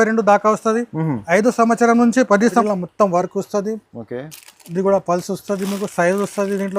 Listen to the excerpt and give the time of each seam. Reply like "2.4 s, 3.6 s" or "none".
2.6 s